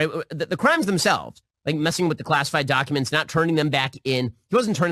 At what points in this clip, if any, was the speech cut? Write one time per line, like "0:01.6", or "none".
none